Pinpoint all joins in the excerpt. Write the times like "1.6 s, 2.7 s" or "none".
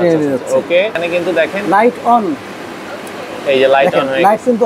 1.0 s